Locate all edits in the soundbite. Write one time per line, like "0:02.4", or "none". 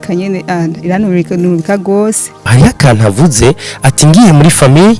0:02.5